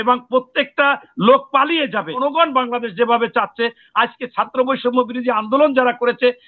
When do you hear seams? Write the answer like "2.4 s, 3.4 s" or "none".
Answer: 2.2 s

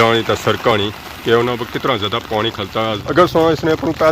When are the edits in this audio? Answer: 3.0 s

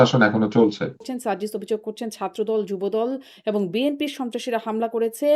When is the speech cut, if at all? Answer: 1.1 s

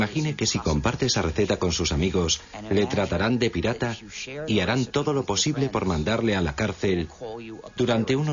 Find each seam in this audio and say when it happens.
1.6 s

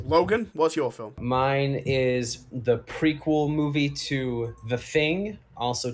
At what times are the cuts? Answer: 1.1 s

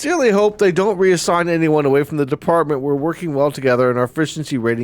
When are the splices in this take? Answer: none

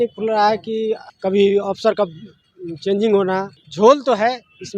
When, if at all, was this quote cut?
1.1 s, 3.6 s

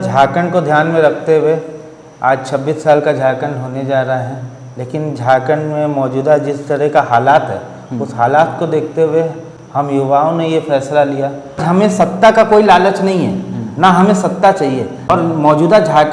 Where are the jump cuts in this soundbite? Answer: 11.6 s, 14.9 s

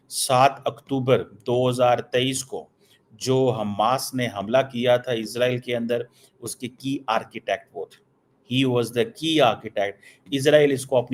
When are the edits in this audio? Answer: none

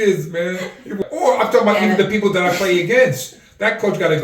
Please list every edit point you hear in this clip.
1.0 s

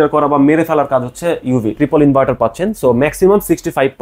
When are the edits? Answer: 1.8 s

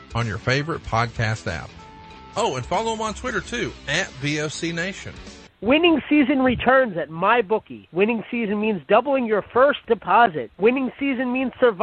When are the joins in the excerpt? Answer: 5.5 s

